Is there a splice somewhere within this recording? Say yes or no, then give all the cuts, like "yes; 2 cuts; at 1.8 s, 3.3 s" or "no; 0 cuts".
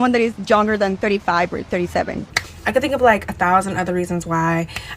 yes; 1 cut; at 2.3 s